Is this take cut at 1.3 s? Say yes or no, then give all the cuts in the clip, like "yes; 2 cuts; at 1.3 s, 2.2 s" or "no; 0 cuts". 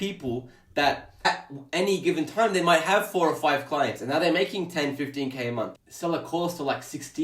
yes; 2 cuts; at 1.3 s, 5.7 s